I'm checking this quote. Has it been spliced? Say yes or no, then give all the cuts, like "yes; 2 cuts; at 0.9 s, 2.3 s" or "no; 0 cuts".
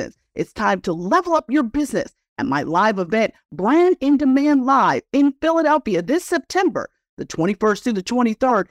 no; 0 cuts